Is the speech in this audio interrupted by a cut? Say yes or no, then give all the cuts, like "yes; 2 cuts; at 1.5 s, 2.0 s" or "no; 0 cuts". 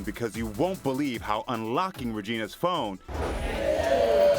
yes; 1 cut; at 3.4 s